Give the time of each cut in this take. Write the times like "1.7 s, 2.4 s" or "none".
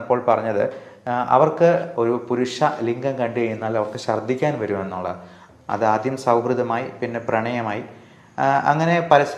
1.9 s, 5.3 s